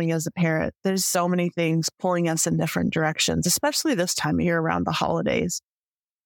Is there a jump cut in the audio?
yes; 1 cut; at 0.9 s

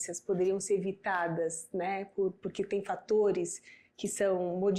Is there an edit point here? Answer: no; 0 cuts

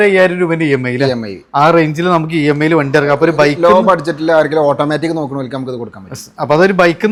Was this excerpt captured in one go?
yes; 0 cuts

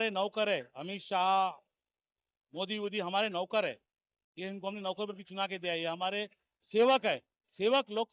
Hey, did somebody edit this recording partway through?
no; 0 cuts

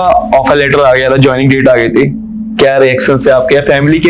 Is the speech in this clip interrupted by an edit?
no; 0 cuts

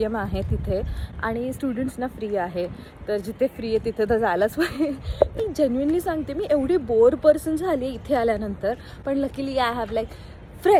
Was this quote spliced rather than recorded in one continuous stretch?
no; 0 cuts

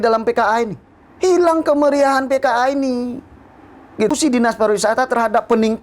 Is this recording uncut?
no; 1 cut; at 4.1 s

